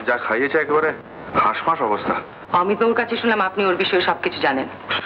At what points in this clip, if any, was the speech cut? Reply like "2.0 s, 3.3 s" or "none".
2.3 s